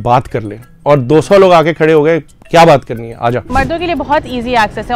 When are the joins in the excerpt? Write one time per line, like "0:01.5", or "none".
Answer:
0:03.5

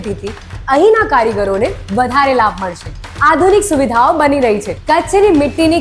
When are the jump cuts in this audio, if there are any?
0:03.0

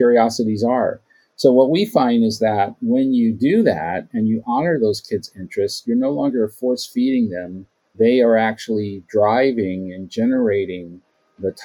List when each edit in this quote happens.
0:07.9

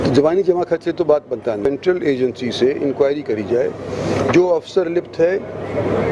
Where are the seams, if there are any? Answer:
0:01.7

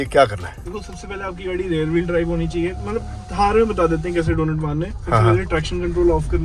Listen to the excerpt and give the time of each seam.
none

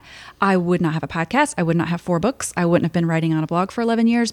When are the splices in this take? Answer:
none

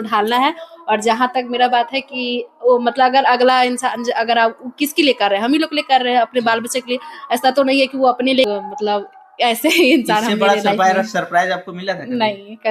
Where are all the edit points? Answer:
0:08.5

